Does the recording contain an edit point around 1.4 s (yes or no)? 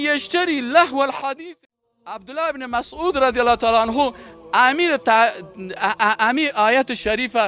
yes